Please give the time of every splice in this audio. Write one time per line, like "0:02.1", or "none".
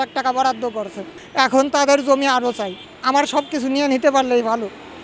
0:01.0